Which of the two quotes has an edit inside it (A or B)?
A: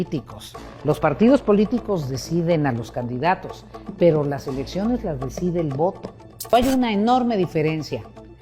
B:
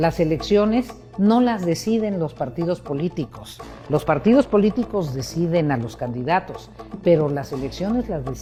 A